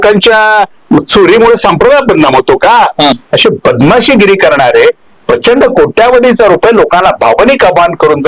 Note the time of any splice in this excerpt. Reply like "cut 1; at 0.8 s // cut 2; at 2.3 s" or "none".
cut 1; at 3.2 s